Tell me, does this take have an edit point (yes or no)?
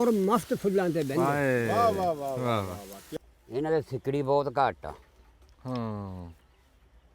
yes